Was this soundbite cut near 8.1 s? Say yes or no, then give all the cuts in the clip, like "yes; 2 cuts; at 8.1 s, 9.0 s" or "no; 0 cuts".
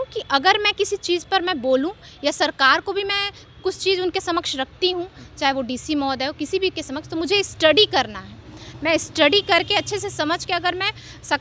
no; 0 cuts